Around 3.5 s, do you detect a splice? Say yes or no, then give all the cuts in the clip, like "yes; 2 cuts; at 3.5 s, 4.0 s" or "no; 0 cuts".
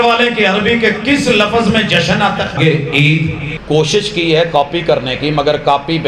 yes; 2 cuts; at 2.6 s, 3.5 s